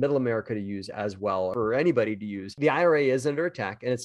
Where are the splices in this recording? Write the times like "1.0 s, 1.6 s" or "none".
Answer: 2.5 s